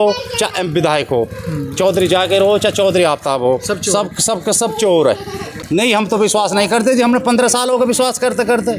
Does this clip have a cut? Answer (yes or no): yes